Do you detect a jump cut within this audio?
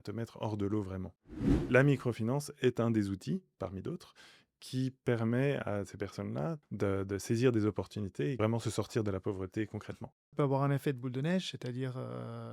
yes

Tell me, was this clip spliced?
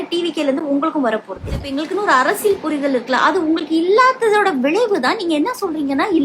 yes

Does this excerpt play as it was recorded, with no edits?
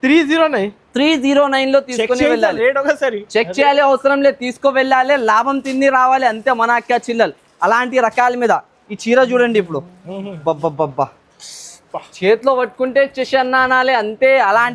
yes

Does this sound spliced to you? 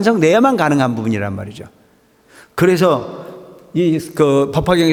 no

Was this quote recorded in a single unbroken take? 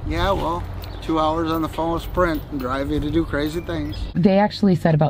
no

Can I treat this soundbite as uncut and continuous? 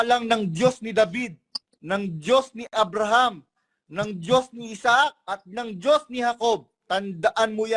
yes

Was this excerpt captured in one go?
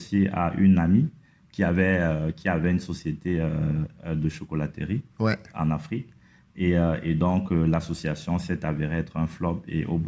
yes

